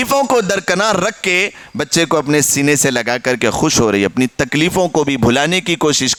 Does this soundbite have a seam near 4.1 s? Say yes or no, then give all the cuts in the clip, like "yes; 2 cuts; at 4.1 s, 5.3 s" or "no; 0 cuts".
no; 0 cuts